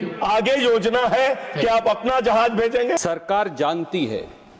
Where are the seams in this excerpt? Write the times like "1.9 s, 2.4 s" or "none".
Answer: 3.0 s